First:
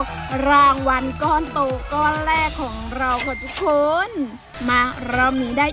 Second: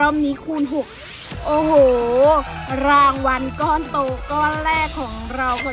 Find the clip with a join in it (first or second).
first